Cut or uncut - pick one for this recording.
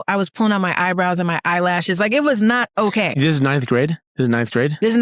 cut